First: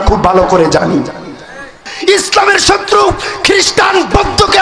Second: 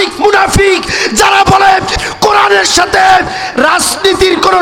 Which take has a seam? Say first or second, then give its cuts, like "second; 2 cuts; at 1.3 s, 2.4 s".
first; 1 cut; at 1.9 s